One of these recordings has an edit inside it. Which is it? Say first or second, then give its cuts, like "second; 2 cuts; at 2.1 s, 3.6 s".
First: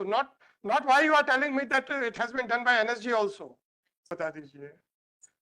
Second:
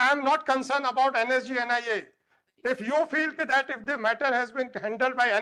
first; 1 cut; at 4.1 s